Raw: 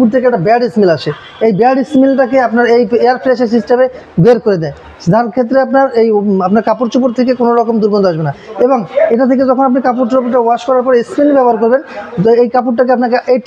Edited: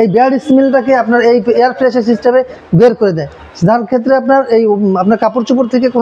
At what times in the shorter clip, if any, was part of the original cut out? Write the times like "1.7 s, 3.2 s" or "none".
none